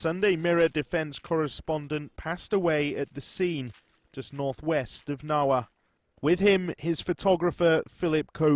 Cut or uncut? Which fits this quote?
cut